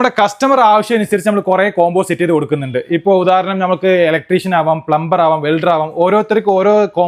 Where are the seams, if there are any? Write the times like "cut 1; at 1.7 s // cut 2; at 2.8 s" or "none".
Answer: none